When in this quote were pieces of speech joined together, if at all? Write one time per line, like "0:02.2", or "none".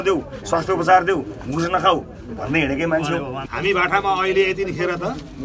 0:03.4